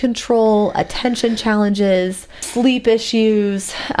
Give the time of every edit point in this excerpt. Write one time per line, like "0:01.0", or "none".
0:02.4